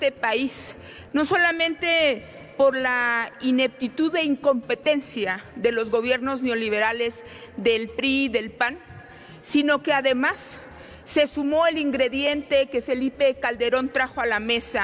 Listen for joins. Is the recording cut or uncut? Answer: uncut